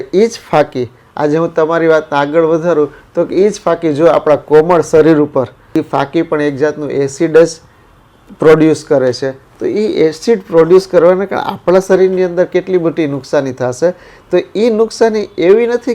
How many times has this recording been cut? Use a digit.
1